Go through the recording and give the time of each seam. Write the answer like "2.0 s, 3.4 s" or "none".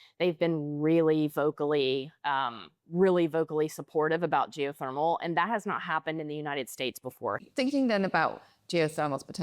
7.4 s